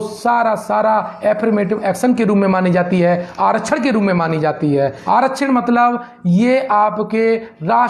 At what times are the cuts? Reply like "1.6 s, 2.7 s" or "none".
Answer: 5.0 s